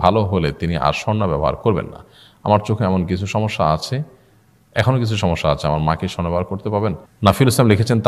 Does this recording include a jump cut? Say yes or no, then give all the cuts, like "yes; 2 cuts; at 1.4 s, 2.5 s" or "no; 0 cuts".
yes; 1 cut; at 7.1 s